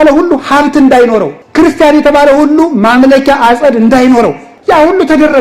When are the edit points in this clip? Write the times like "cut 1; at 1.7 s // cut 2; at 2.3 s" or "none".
cut 1; at 1.4 s // cut 2; at 4.5 s